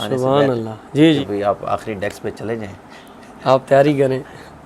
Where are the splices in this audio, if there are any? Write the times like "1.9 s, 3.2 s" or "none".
1.2 s